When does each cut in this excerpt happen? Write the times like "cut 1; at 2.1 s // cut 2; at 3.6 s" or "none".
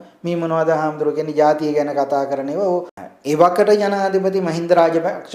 cut 1; at 2.9 s

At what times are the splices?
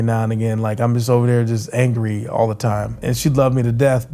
cut 1; at 3.0 s

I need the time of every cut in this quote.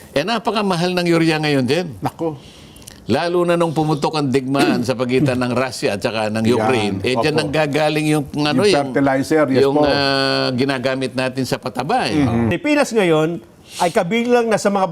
cut 1; at 12.5 s

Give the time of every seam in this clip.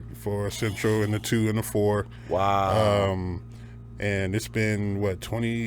none

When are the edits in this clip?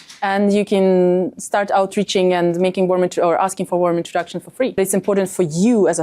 cut 1; at 4.8 s

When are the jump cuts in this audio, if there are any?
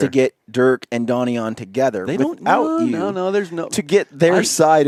none

